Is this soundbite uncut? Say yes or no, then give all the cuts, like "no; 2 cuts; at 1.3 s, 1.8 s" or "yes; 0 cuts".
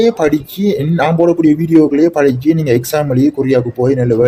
yes; 0 cuts